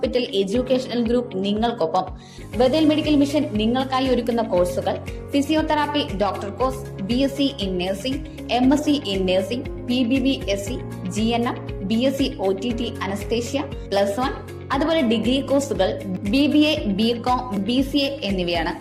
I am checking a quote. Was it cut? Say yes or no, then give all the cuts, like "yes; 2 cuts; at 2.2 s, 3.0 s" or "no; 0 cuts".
no; 0 cuts